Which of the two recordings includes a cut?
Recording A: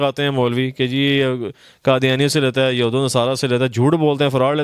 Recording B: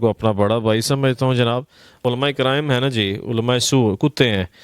B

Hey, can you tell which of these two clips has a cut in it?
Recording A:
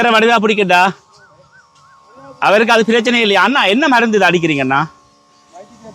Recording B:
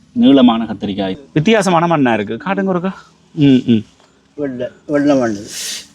B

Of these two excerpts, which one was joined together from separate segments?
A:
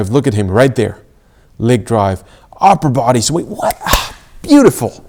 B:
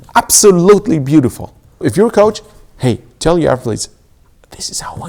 B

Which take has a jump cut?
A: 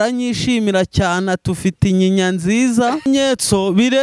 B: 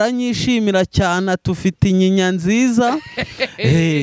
A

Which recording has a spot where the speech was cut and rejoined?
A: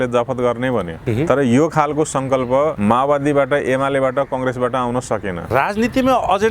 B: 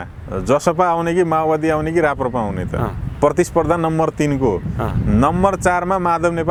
A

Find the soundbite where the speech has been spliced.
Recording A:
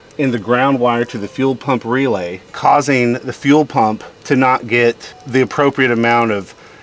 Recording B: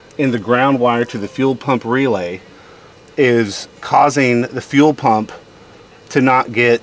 A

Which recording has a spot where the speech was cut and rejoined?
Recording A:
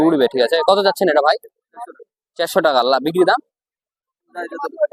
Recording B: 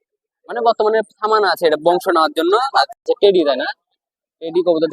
B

